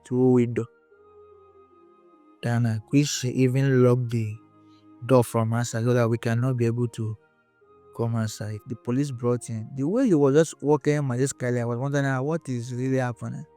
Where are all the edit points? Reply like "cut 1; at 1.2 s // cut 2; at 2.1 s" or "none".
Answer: cut 1; at 8.7 s